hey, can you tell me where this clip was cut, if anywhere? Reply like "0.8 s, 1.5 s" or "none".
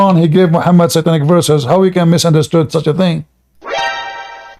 3.3 s

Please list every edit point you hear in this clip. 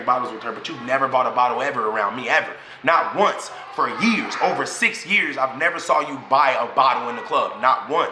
2.9 s

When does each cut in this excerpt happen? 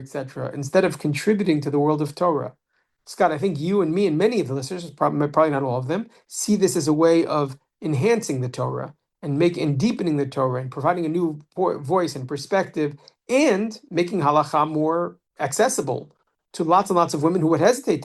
15.2 s

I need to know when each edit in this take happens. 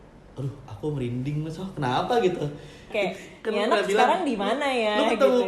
2.9 s

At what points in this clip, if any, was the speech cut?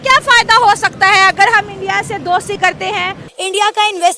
3.2 s

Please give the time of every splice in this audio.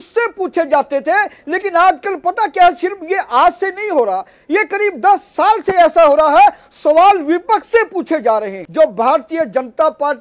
8.6 s

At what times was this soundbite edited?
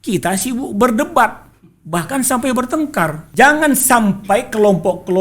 3.2 s

